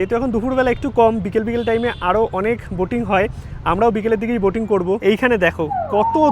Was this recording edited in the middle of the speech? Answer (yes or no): yes